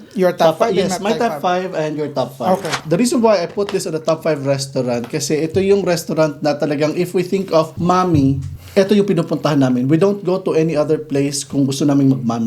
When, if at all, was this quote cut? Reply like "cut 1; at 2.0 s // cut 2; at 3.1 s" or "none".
cut 1; at 2.7 s // cut 2; at 7.7 s // cut 3; at 8.5 s